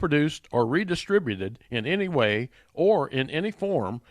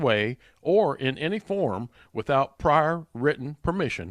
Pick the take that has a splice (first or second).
first